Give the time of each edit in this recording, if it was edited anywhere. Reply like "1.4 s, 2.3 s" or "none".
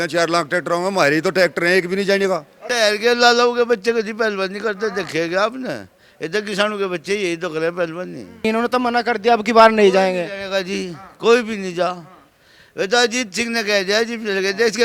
2.6 s, 8.2 s